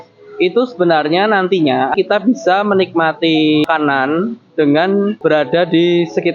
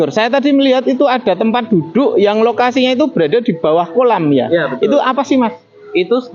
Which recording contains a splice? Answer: first; 3 cuts; at 1.9 s, 3.6 s, 5.1 s

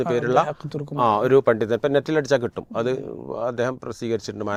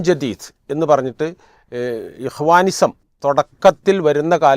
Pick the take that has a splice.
second; 1 cut; at 3.1 s

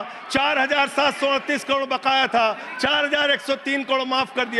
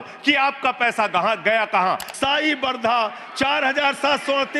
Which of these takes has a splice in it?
second; 1 cut; at 2.1 s

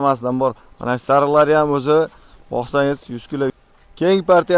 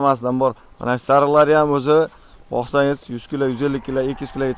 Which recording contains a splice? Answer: first; 1 cut; at 3.6 s

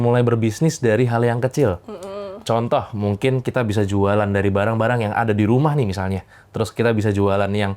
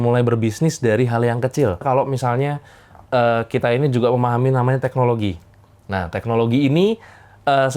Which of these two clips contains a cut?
second; 1 cut; at 1.8 s

